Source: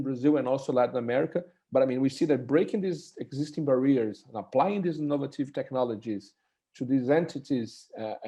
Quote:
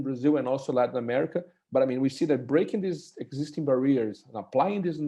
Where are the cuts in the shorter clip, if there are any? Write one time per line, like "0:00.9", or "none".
none

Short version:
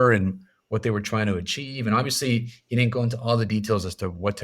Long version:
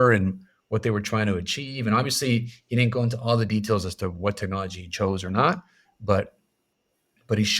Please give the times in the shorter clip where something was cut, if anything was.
none

